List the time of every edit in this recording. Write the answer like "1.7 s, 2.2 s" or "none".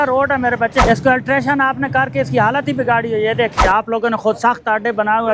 0.8 s, 3.6 s